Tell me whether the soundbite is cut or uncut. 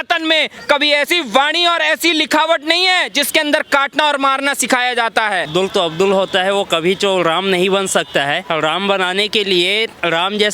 cut